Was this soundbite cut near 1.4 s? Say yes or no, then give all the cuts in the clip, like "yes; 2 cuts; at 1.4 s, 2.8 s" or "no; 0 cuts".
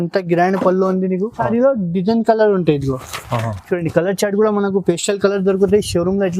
yes; 1 cut; at 1.4 s